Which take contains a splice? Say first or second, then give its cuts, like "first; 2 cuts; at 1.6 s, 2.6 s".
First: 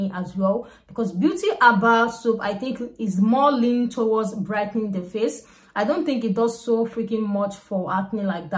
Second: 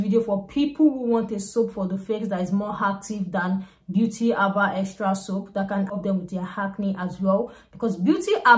second; 1 cut; at 5.9 s